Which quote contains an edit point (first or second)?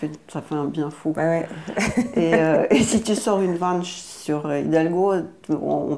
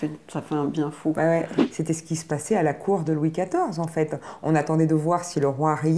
second